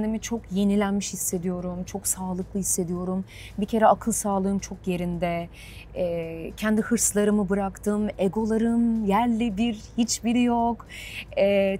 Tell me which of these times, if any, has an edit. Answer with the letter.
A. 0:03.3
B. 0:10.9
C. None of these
C